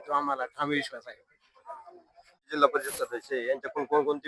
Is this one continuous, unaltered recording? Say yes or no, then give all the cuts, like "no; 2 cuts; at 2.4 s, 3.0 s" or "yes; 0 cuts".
yes; 0 cuts